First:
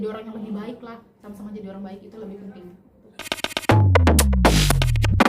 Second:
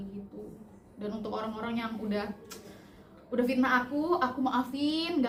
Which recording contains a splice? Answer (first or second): first